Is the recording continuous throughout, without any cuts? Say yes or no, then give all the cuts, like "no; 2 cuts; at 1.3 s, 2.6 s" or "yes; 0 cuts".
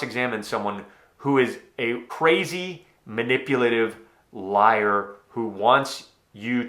no; 1 cut; at 2.1 s